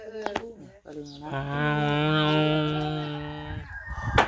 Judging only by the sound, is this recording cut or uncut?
cut